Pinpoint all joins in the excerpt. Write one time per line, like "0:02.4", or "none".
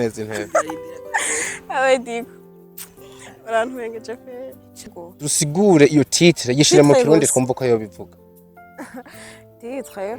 0:05.0